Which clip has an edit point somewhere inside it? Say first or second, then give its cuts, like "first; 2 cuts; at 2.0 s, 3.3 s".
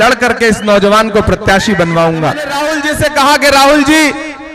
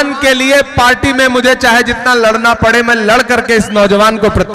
first; 1 cut; at 2.6 s